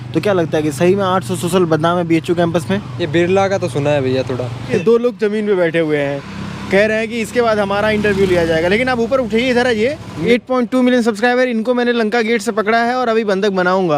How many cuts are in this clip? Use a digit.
2